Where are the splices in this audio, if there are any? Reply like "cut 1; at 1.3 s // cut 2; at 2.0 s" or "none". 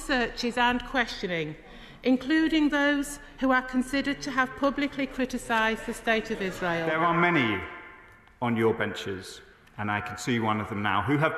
cut 1; at 6.9 s